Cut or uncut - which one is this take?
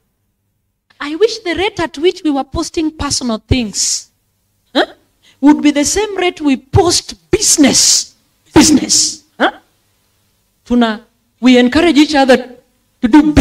cut